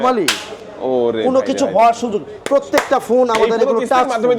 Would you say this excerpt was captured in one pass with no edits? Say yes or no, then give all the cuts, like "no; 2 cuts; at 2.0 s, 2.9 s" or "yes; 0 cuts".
yes; 0 cuts